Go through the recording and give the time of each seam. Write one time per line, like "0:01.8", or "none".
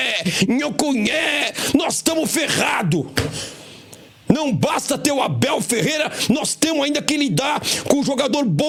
none